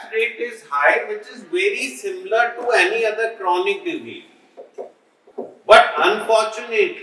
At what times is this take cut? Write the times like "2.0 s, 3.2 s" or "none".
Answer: 5.2 s